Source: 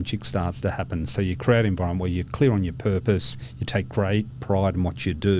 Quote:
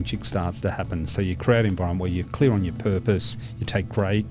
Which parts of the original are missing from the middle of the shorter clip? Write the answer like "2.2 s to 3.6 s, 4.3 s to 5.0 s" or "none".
none